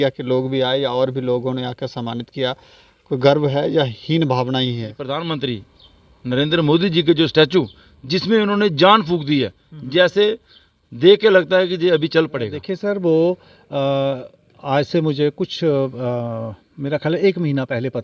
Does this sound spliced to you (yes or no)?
yes